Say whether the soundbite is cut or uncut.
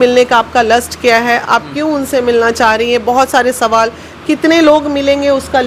uncut